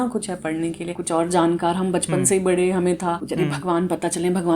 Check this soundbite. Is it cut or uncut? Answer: cut